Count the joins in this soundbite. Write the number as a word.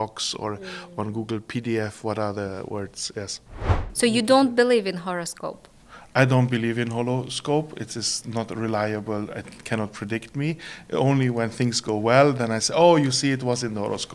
one